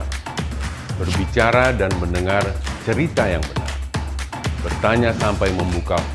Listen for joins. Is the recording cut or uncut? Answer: uncut